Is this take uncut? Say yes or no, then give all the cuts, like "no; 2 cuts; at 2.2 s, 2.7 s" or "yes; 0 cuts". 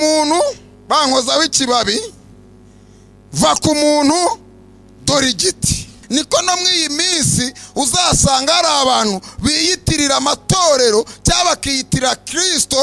no; 1 cut; at 6.0 s